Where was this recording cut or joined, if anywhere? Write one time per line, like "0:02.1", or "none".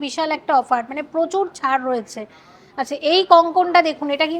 none